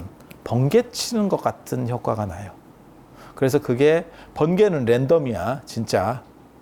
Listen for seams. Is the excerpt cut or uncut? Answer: uncut